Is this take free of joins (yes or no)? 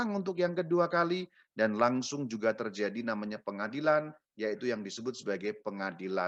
yes